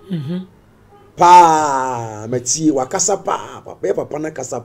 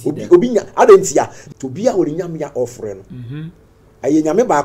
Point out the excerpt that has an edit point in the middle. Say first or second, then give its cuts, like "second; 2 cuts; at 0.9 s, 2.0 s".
second; 1 cut; at 1.4 s